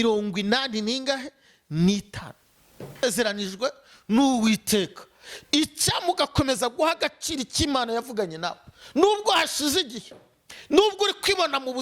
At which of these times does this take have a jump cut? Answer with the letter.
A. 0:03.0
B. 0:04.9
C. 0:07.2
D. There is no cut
A